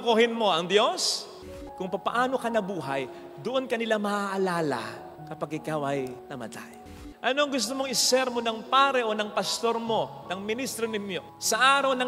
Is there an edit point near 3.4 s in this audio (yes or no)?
no